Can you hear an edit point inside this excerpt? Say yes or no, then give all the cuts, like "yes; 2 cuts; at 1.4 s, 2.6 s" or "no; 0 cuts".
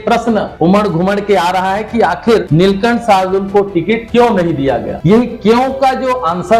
no; 0 cuts